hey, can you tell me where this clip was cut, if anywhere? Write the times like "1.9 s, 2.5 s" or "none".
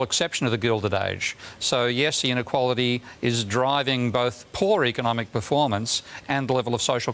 none

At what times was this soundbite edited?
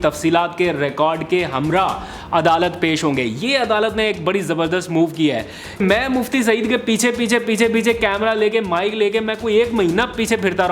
5.8 s

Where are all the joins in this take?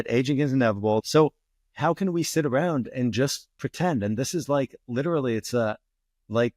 1.0 s

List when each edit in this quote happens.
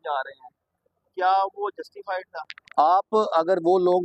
2.6 s

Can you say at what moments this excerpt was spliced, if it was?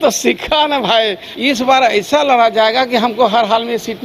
1.2 s

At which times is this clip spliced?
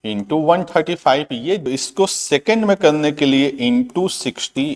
1.7 s

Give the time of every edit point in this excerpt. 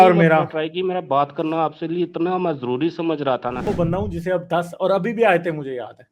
3.7 s

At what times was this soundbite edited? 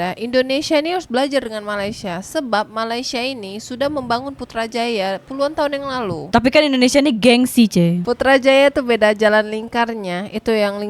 none

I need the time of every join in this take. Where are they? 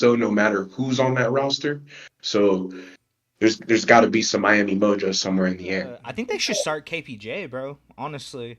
6.0 s

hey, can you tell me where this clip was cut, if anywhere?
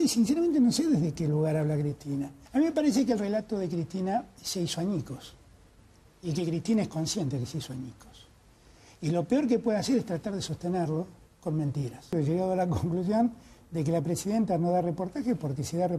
2.4 s, 12.1 s

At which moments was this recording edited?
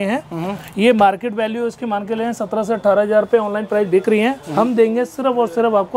none

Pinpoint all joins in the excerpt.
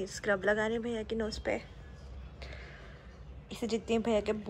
3.5 s

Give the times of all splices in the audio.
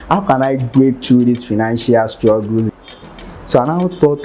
2.7 s

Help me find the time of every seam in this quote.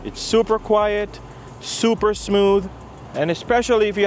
none

